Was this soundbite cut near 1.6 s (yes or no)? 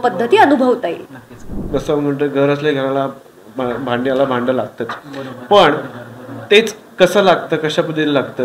yes